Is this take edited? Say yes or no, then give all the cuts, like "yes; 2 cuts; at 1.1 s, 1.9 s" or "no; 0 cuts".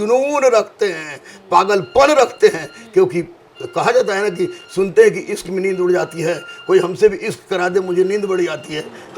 no; 0 cuts